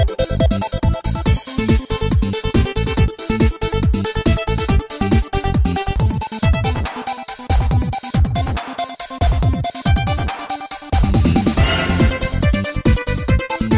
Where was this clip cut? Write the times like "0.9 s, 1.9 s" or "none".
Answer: 5.9 s